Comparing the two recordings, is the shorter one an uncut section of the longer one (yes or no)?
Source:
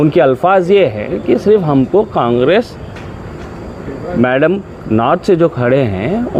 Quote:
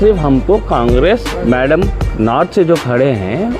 no